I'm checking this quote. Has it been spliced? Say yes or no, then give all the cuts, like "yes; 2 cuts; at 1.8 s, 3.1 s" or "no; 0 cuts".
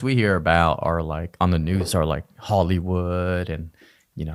no; 0 cuts